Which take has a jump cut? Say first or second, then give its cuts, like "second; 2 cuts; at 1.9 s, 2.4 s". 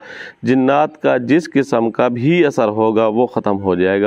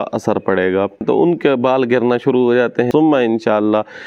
second; 2 cuts; at 1.0 s, 2.9 s